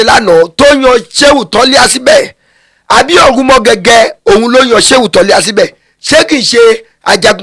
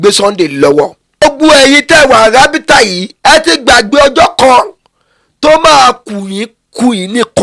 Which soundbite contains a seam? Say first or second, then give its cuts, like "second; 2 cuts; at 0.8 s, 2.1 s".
second; 1 cut; at 1.2 s